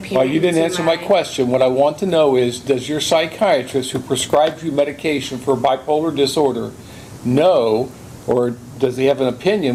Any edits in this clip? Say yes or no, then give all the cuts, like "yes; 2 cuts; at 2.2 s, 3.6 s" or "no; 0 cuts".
no; 0 cuts